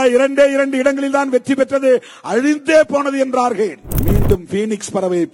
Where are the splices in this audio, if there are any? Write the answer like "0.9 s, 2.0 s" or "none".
3.9 s